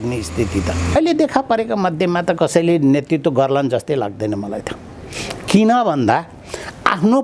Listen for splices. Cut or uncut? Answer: cut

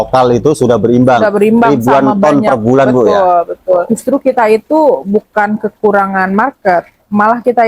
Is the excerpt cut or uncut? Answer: cut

